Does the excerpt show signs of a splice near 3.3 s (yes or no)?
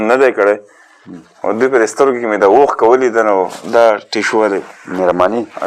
no